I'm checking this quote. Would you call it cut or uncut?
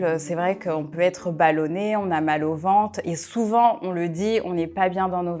uncut